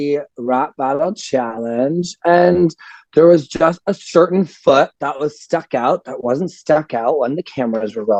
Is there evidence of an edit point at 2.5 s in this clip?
no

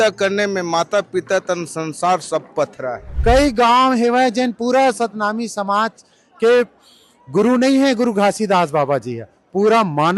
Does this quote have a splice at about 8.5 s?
no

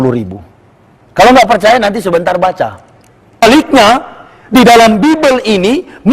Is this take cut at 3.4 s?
yes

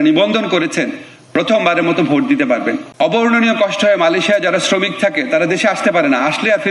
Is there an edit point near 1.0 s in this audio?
no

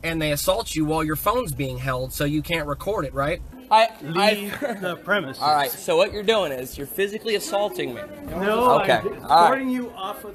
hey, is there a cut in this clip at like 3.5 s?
yes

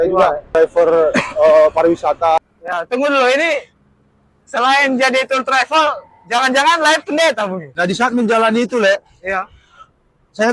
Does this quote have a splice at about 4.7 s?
no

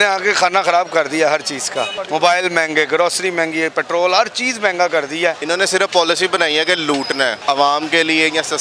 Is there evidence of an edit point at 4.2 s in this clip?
no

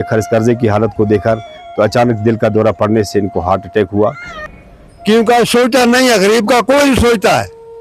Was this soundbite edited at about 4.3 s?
yes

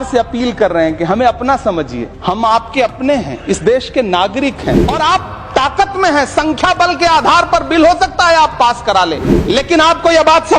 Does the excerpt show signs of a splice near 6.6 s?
no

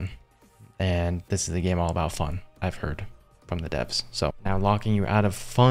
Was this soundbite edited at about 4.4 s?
yes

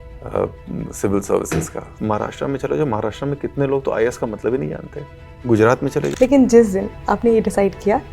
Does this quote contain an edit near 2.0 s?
yes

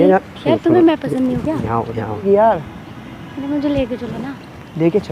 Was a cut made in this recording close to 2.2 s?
yes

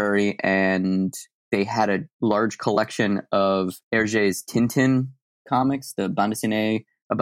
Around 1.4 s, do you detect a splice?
yes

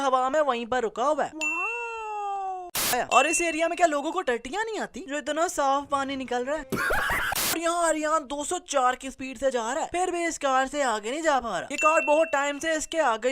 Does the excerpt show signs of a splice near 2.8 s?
yes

